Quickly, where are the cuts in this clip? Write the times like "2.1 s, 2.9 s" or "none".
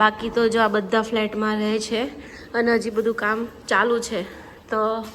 none